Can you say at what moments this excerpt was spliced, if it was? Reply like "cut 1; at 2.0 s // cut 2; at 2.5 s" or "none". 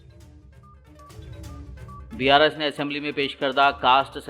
cut 1; at 1.5 s